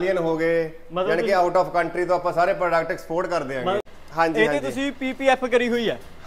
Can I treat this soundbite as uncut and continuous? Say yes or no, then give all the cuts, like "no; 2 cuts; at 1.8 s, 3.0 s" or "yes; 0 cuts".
no; 1 cut; at 3.8 s